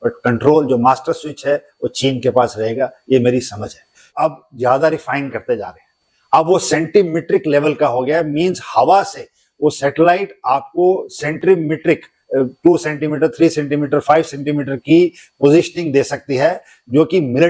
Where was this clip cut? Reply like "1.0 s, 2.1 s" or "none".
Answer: 4.0 s